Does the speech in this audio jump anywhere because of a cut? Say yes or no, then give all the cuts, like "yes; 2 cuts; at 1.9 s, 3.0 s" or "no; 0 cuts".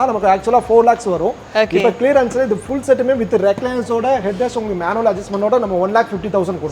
no; 0 cuts